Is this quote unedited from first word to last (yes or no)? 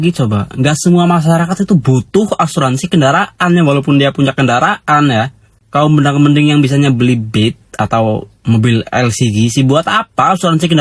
yes